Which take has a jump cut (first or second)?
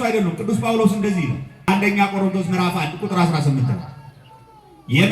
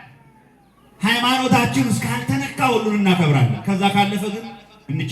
first